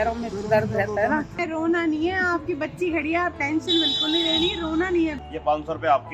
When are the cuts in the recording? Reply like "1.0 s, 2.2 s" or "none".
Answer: 1.3 s, 5.3 s